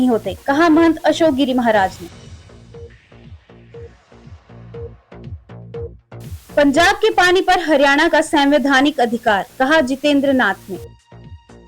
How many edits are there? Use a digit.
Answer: 1